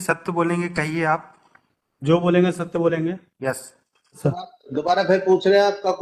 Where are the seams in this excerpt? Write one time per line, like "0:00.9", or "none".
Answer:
0:04.2